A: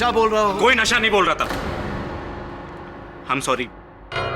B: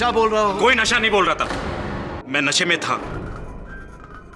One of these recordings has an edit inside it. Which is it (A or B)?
B